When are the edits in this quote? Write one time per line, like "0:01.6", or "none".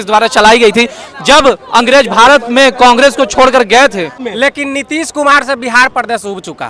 0:04.2